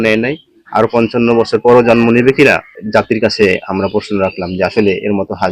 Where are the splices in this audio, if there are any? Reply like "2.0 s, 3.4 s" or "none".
2.7 s